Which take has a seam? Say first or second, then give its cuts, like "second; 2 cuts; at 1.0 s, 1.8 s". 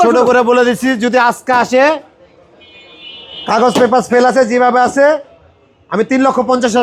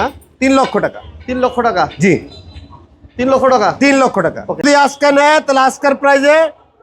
second; 1 cut; at 4.6 s